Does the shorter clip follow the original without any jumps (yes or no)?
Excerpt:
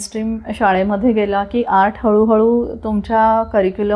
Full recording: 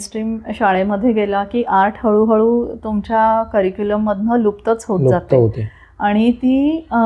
yes